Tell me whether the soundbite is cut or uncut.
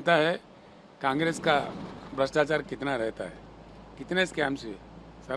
uncut